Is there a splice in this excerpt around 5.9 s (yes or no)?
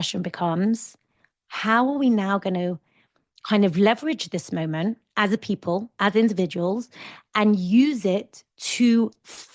no